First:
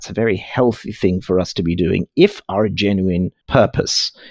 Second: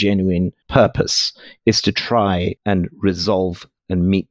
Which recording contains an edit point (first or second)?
second